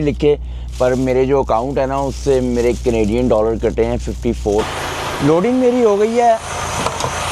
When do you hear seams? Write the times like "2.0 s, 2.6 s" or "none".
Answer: 4.7 s